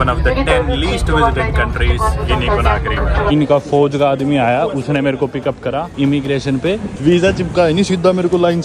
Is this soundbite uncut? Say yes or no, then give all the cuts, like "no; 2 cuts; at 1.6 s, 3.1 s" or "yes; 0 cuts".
no; 3 cuts; at 3.3 s, 5.9 s, 6.9 s